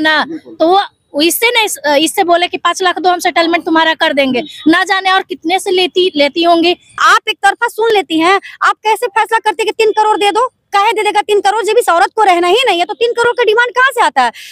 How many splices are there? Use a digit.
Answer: 1